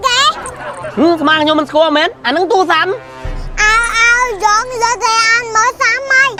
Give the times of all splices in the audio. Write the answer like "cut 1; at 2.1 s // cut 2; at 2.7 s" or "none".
none